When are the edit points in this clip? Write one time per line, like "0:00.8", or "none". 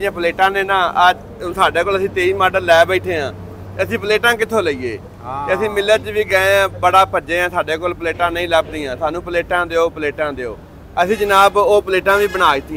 none